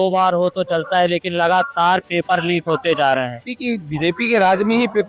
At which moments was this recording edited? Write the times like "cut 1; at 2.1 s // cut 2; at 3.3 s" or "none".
cut 1; at 3.5 s